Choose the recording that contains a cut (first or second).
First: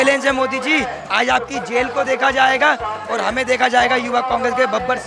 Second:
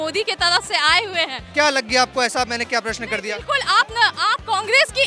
second